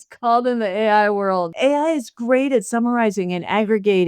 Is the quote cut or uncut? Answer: cut